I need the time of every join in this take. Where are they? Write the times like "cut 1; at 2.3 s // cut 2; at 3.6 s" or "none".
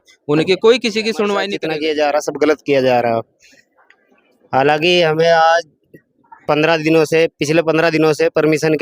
cut 1; at 1.6 s